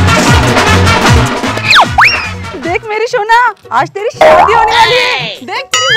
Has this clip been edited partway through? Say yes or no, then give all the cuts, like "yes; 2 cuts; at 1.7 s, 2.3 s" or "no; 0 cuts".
yes; 1 cut; at 1.5 s